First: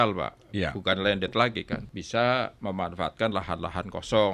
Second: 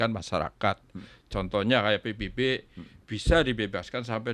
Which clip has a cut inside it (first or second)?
first